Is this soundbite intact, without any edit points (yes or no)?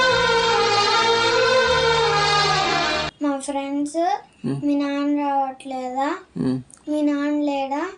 no